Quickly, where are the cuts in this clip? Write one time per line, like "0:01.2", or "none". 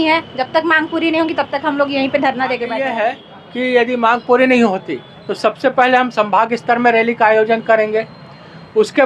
0:02.8